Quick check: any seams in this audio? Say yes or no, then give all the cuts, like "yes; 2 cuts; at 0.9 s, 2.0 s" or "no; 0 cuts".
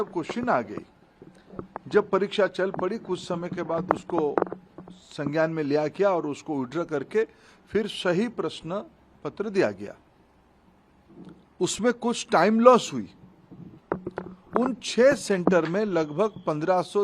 no; 0 cuts